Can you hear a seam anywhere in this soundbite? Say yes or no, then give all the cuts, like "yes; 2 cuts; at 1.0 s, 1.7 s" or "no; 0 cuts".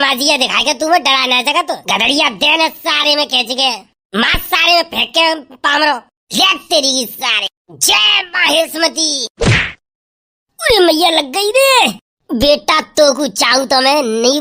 yes; 1 cut; at 1.8 s